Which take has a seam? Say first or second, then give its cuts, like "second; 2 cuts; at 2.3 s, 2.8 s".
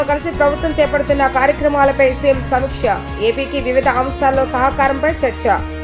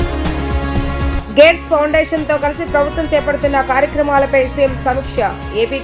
second; 1 cut; at 1.2 s